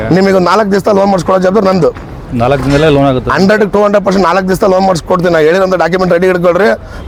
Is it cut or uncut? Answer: uncut